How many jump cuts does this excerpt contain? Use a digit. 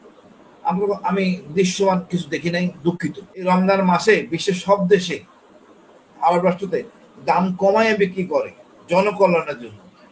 1